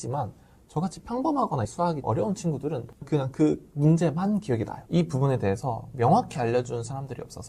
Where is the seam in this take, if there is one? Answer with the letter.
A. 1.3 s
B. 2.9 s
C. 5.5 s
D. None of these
B